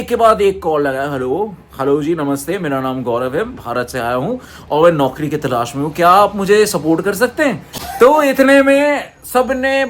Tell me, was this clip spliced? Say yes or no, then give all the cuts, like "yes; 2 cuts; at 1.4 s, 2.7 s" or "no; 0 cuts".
no; 0 cuts